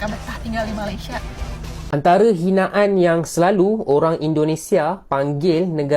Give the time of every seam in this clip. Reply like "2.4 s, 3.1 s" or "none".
2.0 s